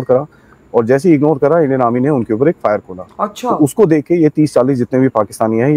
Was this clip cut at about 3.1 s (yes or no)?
yes